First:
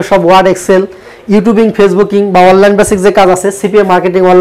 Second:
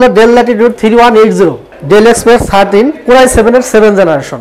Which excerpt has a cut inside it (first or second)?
second